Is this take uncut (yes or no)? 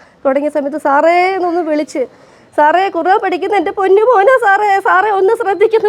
yes